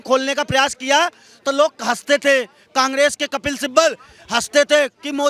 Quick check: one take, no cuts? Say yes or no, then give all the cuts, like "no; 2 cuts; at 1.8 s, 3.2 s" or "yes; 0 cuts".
yes; 0 cuts